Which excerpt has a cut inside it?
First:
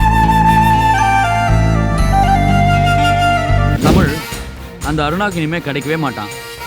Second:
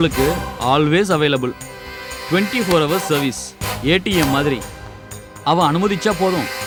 first; 1 cut; at 3.8 s

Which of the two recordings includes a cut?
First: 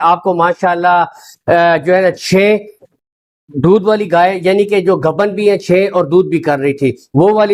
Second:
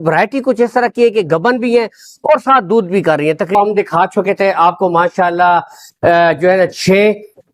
second; 1 cut; at 3.5 s

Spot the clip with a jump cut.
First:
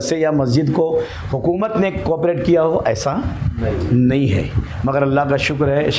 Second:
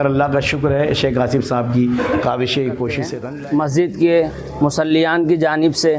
second; 1 cut; at 3.1 s

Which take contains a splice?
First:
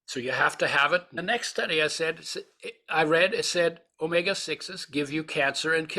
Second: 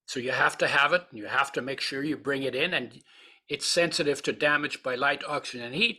first; 1 cut; at 1.2 s

